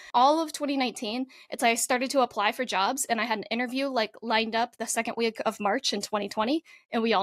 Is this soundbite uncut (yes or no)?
yes